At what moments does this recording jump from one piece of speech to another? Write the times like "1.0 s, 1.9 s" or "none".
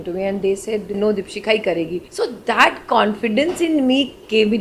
0.9 s, 2.0 s